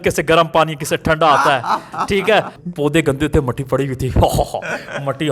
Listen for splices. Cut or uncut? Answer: cut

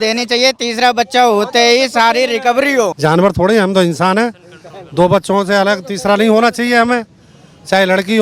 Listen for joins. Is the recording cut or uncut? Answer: cut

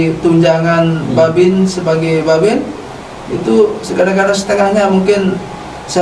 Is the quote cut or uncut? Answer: uncut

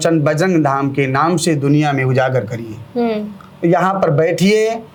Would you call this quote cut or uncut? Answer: uncut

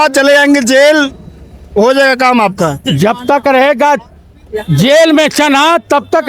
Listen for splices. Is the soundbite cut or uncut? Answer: uncut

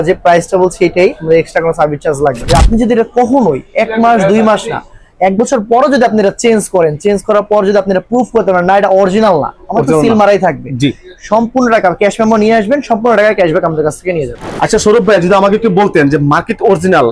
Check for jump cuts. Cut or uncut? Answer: cut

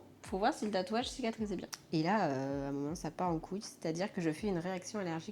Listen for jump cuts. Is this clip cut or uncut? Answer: cut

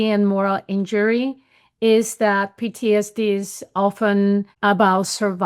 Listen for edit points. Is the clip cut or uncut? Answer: cut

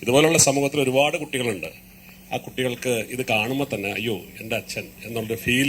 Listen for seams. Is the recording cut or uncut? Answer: uncut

